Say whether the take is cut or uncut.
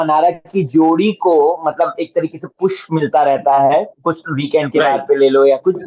uncut